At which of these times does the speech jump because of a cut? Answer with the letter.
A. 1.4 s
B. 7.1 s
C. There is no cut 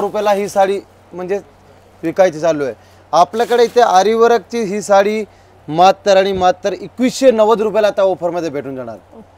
C